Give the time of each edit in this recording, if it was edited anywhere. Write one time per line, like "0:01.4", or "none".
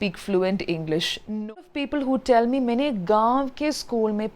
0:01.7